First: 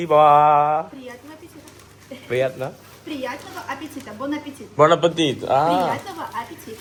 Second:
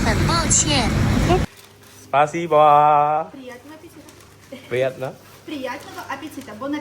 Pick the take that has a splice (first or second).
second